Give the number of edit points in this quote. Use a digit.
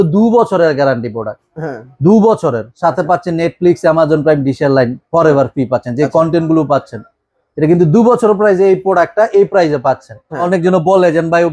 1